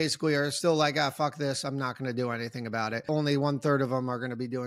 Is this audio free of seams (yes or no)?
no